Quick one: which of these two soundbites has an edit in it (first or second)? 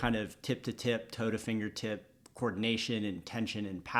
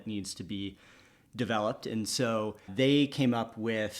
second